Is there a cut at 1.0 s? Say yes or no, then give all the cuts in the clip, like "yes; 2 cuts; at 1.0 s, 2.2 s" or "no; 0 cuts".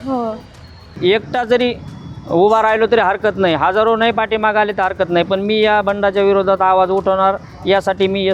yes; 1 cut; at 1.0 s